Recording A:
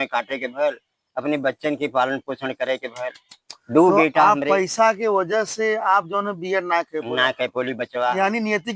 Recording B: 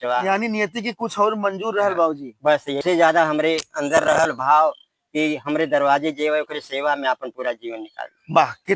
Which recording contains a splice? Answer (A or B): B